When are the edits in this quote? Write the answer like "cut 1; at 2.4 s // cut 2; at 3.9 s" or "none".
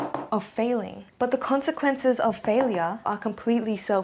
cut 1; at 3.0 s

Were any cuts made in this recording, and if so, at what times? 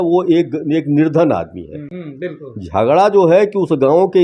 cut 1; at 1.9 s

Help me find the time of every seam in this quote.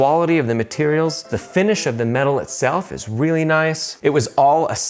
cut 1; at 1.3 s // cut 2; at 3.9 s

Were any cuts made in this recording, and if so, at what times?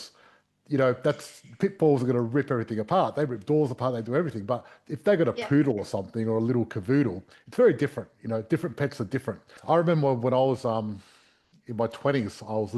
cut 1; at 9.5 s

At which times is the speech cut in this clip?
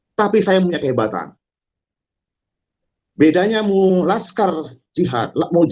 none

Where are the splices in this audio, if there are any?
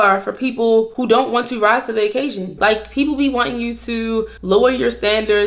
cut 1; at 0.9 s // cut 2; at 2.5 s // cut 3; at 4.3 s

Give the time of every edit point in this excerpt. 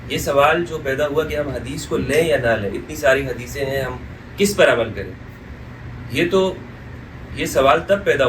none

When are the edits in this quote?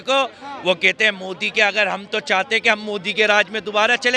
none

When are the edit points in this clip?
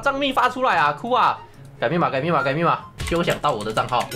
cut 1; at 2.9 s

